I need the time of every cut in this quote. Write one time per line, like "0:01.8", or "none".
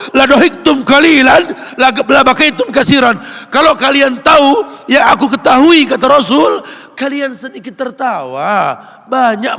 none